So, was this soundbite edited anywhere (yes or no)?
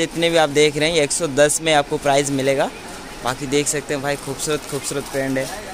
no